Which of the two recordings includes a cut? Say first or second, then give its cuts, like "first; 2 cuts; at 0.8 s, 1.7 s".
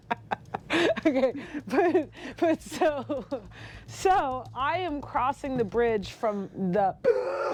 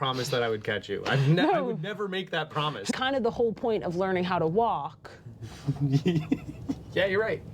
second; 1 cut; at 2.9 s